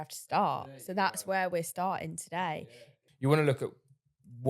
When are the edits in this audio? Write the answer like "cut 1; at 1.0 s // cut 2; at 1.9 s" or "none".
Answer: cut 1; at 2.6 s

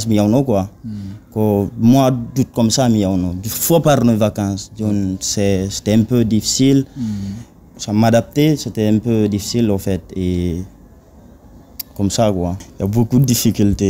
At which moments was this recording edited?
cut 1; at 12.7 s

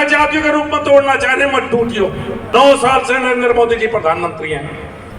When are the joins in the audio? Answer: cut 1; at 2.5 s

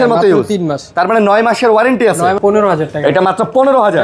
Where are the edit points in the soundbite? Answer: cut 1; at 2.4 s

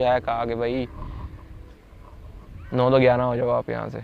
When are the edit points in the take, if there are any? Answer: none

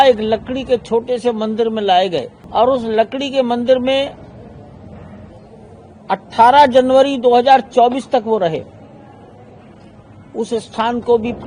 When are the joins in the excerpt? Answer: cut 1; at 2.4 s

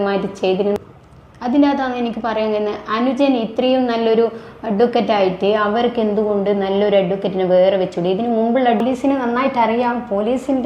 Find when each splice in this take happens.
cut 1; at 0.8 s // cut 2; at 8.8 s

